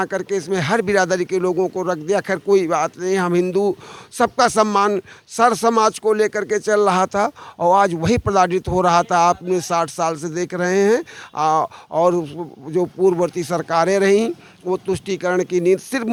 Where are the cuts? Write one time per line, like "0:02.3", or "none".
none